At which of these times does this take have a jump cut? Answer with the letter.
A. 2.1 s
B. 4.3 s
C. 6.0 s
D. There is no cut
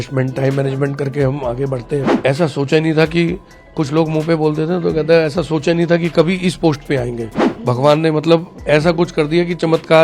A